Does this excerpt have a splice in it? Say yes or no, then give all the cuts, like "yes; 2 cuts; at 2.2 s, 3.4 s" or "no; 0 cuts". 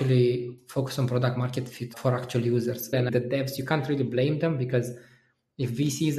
yes; 2 cuts; at 1.9 s, 3.1 s